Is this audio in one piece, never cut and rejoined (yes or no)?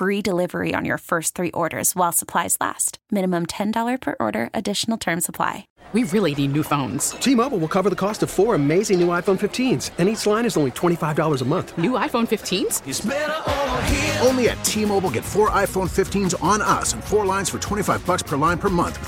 no